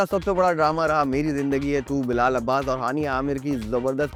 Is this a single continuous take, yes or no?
yes